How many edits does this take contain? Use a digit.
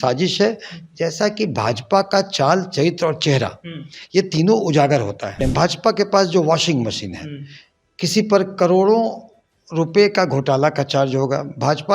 1